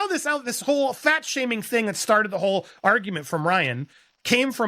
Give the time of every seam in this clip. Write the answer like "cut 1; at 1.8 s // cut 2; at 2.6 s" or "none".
none